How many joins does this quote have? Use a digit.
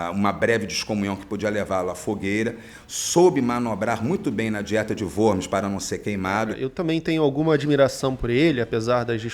1